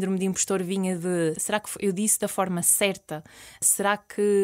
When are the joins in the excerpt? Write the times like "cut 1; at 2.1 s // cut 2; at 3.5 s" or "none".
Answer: cut 1; at 1.4 s // cut 2; at 3.6 s